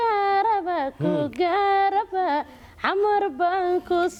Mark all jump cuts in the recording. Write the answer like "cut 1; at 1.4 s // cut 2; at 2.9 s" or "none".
none